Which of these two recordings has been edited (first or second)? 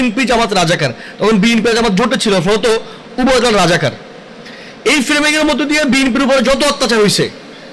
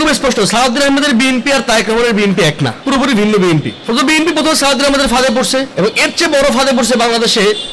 second